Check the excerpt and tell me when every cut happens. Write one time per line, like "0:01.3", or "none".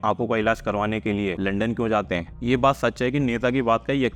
0:01.4
0:02.3